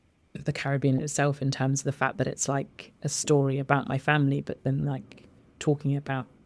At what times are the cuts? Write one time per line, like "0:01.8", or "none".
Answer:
none